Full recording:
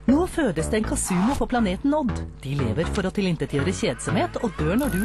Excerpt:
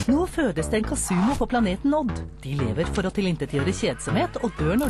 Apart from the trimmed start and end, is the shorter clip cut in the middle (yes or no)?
no